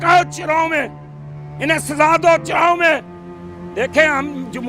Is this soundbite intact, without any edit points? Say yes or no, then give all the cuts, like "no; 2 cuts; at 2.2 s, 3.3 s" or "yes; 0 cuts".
yes; 0 cuts